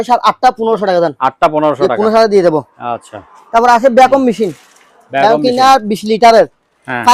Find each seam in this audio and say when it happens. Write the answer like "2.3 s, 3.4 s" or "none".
none